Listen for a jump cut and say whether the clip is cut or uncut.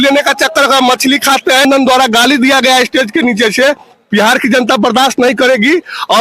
cut